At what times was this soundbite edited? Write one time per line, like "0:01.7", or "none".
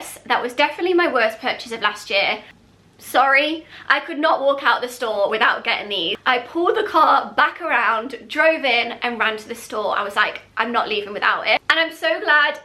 0:02.5
0:06.1
0:11.6